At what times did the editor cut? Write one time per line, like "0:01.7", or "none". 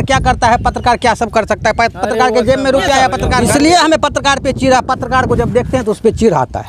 0:03.4